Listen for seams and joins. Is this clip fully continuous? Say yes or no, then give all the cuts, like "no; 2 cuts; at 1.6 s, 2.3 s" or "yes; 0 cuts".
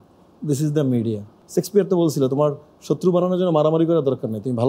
no; 1 cut; at 1.3 s